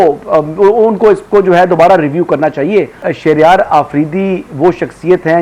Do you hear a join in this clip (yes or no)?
yes